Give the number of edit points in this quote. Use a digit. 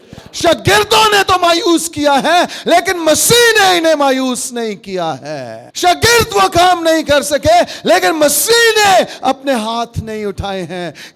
1